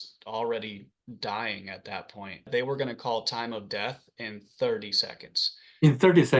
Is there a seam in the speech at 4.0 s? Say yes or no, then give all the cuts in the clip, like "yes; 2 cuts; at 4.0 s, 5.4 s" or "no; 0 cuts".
no; 1 cut; at 2.5 s